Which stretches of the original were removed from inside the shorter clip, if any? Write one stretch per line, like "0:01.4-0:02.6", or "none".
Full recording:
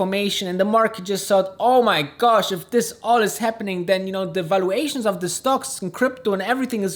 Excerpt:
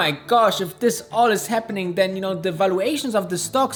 none

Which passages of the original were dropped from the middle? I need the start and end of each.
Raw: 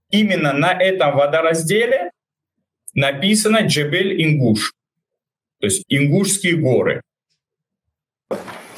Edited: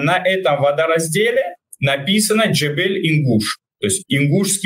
0:02.2-0:02.8
0:04.8-0:05.4

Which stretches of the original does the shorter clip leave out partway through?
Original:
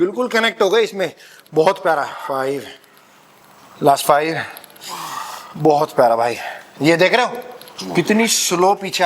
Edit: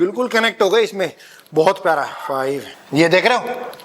0:02.7-0:06.6

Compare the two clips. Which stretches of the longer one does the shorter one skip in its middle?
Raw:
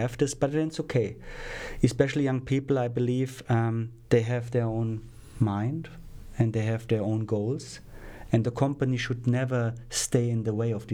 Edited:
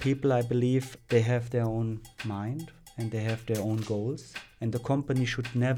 0:03.4-0:03.9
0:05.1-0:05.3
0:06.2-0:06.4
0:08.1-0:08.4

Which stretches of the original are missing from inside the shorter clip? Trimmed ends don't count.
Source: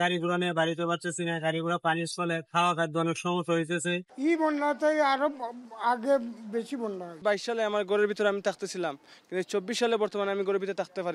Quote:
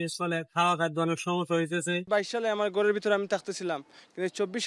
0:04.0-0:07.2

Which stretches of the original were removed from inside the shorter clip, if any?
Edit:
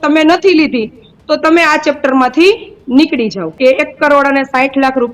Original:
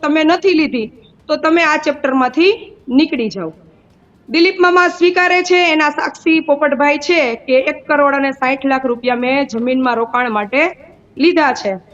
0:03.5-0:07.4

